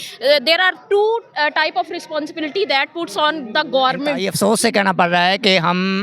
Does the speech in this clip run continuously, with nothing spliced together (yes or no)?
no